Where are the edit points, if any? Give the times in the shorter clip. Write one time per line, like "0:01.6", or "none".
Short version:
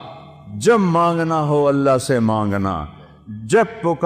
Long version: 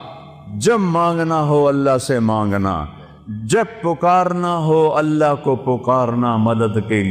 none

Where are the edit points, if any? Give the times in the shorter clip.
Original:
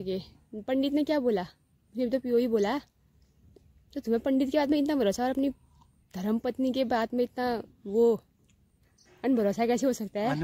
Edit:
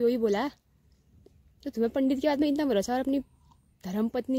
none

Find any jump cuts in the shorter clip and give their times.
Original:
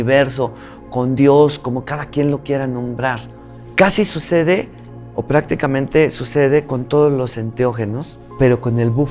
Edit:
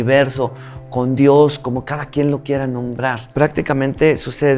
0:03.2

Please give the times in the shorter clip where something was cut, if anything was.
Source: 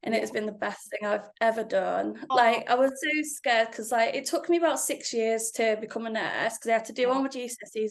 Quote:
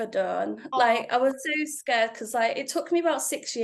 none

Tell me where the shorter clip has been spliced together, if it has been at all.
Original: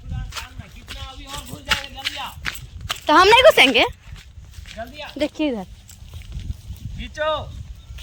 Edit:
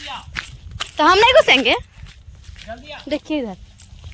none

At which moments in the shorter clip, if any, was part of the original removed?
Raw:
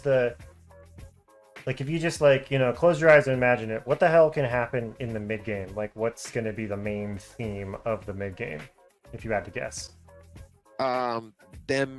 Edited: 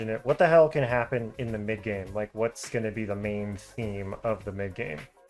none

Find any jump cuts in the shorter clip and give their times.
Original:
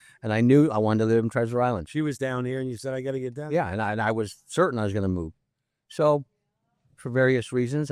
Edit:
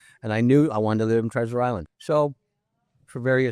0:01.9

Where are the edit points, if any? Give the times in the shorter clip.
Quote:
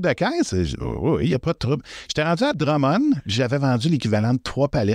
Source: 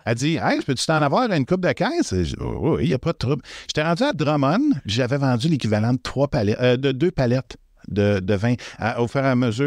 none

